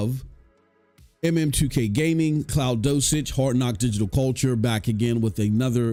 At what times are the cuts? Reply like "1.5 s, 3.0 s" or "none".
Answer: none